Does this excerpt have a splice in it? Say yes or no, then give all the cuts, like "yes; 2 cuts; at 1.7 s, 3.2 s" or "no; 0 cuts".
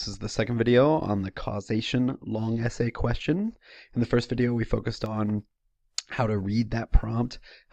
yes; 1 cut; at 2.9 s